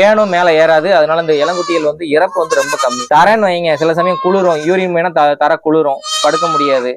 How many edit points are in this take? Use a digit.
0